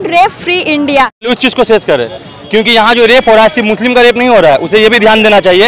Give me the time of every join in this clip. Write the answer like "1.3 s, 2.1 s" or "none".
1.3 s